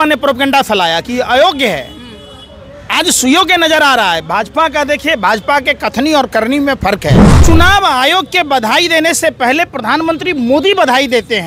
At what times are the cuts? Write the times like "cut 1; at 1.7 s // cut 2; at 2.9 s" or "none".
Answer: cut 1; at 7.3 s